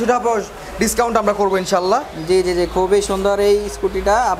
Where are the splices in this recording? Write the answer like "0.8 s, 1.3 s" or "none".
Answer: none